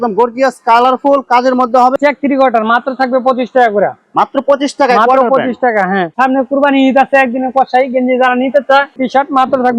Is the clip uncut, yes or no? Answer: no